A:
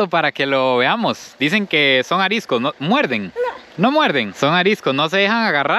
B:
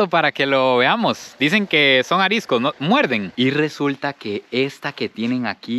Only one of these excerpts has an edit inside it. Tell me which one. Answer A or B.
B